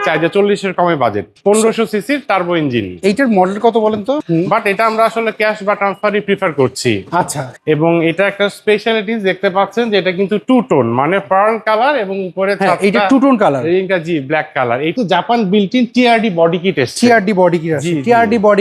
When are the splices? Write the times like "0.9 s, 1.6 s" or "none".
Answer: 1.3 s, 4.2 s, 7.5 s, 14.9 s